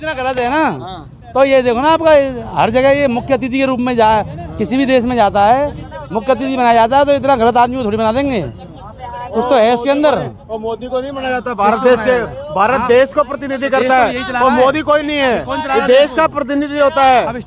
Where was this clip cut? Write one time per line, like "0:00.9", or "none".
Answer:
none